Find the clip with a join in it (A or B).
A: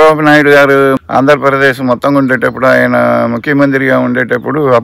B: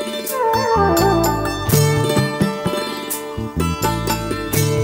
A